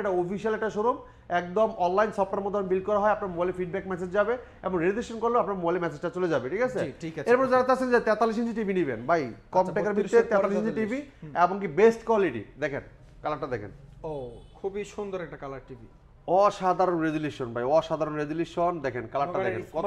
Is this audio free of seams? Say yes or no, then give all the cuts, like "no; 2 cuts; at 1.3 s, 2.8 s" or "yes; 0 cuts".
yes; 0 cuts